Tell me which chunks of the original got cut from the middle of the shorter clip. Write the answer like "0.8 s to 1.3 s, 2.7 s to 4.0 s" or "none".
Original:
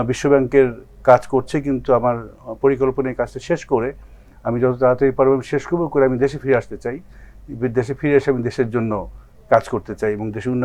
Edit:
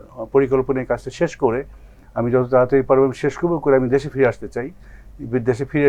none